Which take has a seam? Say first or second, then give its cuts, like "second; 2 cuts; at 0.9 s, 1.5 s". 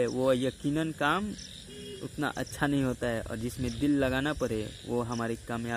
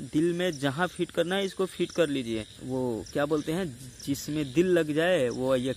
second; 1 cut; at 2.5 s